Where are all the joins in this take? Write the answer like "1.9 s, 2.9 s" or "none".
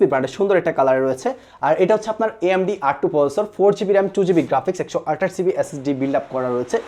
none